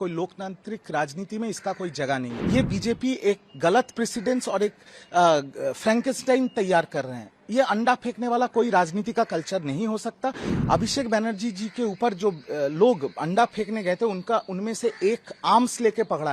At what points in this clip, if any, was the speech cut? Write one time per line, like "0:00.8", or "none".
0:02.4
0:10.5

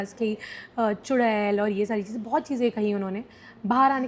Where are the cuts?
none

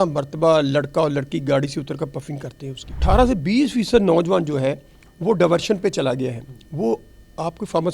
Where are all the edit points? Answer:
0:03.0

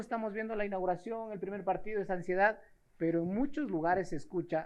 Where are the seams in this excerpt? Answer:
none

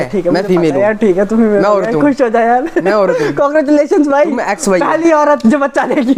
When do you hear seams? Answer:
none

